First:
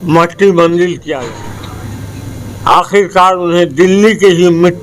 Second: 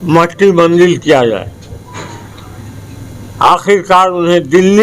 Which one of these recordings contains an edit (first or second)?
first